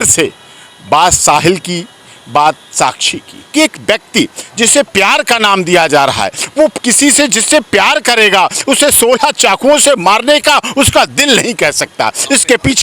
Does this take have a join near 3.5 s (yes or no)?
yes